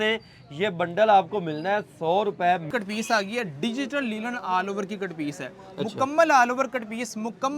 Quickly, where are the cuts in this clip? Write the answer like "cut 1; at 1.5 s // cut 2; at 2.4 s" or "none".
cut 1; at 2.7 s